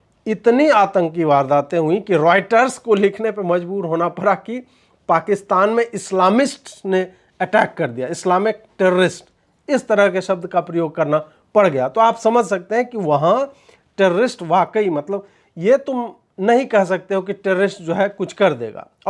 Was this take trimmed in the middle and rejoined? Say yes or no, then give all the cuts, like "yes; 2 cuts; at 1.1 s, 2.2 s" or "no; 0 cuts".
no; 0 cuts